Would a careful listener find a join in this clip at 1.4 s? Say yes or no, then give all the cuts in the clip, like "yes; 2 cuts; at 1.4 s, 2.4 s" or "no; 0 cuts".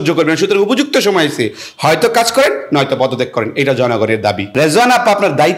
no; 1 cut; at 4.4 s